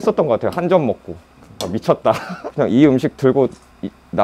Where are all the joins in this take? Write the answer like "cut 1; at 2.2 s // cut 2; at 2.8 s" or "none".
cut 1; at 2.3 s